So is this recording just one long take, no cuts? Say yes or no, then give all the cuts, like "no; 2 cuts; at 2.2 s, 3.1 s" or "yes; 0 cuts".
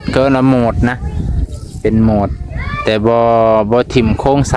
yes; 0 cuts